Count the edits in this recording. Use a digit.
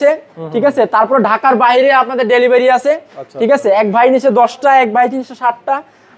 0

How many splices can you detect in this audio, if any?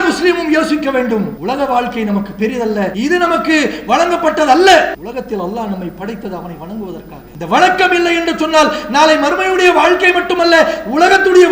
4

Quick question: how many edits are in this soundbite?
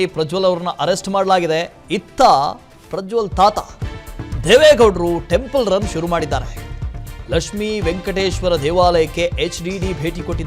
1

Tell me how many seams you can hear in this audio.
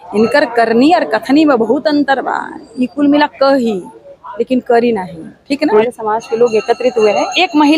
1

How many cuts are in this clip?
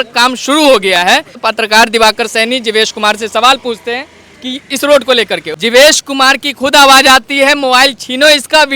2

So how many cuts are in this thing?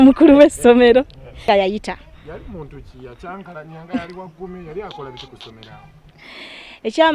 1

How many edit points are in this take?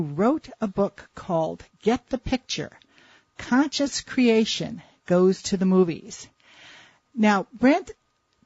0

